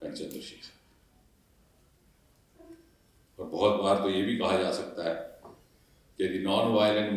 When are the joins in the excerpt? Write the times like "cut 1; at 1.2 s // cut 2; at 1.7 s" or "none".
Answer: none